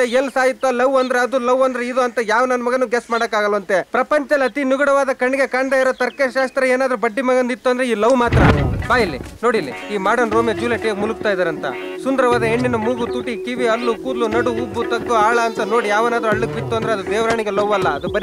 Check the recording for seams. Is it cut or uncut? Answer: uncut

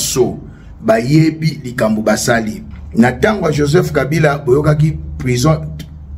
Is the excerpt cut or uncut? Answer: cut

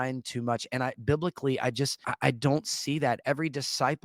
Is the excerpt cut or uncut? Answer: cut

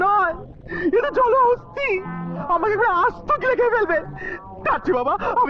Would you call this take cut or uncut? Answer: uncut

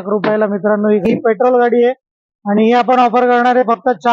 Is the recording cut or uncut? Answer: cut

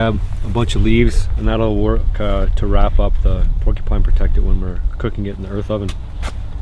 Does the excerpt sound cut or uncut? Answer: uncut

